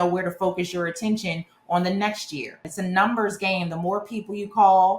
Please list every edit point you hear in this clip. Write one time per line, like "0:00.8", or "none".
0:02.7